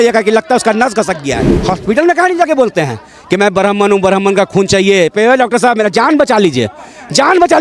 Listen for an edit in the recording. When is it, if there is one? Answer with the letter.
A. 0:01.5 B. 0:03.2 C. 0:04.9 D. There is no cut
A